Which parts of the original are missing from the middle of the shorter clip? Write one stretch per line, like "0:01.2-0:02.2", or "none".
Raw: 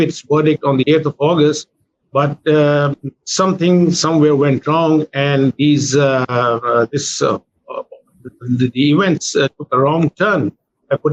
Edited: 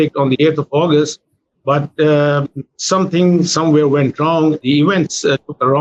0:05.1-0:08.7